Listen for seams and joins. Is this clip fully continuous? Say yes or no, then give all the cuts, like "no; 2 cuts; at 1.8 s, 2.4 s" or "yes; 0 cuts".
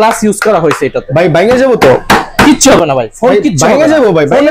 yes; 0 cuts